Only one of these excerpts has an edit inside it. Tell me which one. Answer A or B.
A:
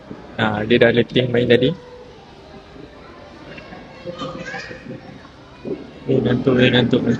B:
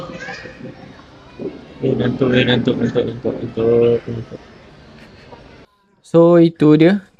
B